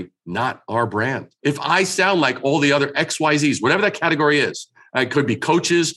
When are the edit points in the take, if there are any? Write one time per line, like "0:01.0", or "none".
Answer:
0:01.3